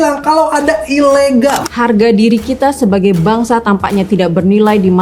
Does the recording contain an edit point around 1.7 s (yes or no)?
yes